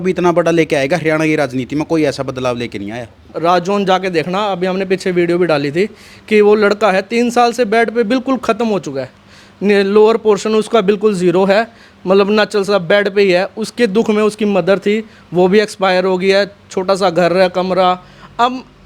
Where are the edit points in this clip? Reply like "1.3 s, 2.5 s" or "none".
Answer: 3.3 s